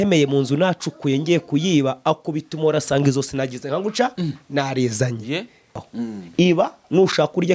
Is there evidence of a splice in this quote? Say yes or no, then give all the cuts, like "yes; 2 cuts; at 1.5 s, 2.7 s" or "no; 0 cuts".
yes; 1 cut; at 5.7 s